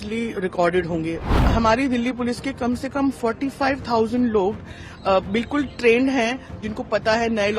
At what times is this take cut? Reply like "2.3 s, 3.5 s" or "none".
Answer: 1.4 s